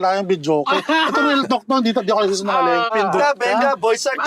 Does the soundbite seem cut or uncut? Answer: cut